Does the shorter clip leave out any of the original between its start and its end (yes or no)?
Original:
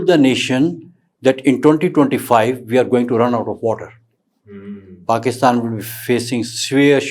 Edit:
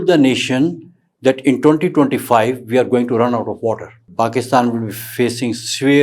yes